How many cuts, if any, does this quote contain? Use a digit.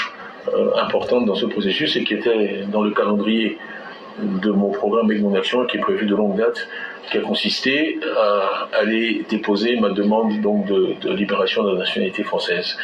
1